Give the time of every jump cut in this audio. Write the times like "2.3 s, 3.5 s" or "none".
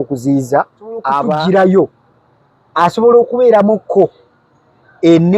1.2 s